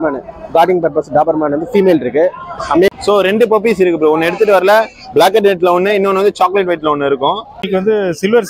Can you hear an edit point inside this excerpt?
yes; 2 cuts; at 2.9 s, 7.6 s

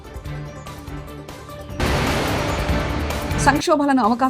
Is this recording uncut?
no; 2 cuts; at 1.8 s, 3.3 s

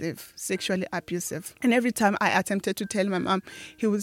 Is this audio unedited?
no; 1 cut; at 1.5 s

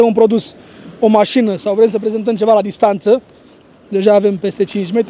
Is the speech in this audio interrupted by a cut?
no; 0 cuts

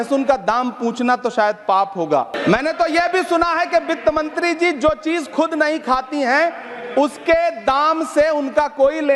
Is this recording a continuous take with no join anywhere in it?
no; 1 cut; at 2.3 s

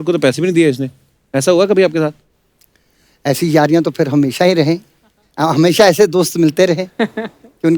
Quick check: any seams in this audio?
no; 0 cuts

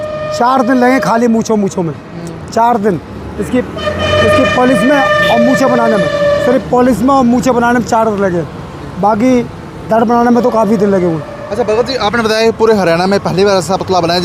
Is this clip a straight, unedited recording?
yes; 0 cuts

